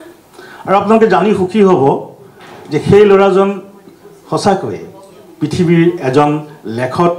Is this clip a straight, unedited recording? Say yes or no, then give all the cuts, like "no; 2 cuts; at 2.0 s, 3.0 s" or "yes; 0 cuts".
yes; 0 cuts